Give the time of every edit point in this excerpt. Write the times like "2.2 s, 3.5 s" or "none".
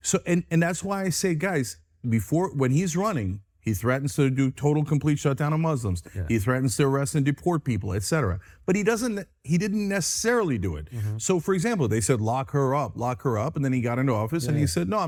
none